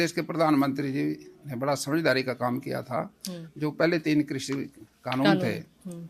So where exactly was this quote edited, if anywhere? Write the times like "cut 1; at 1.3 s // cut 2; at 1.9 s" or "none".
none